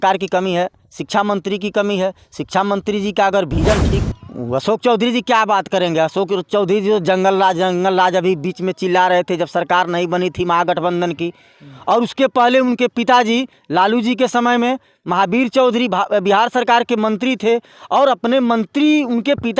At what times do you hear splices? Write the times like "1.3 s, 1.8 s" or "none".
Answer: 4.0 s